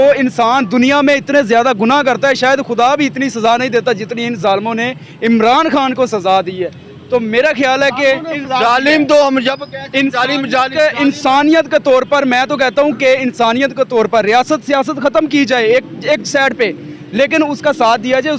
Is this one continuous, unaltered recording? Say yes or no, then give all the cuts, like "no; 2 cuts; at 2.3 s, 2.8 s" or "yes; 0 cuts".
yes; 0 cuts